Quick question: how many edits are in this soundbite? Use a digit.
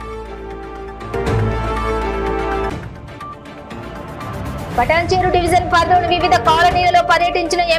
1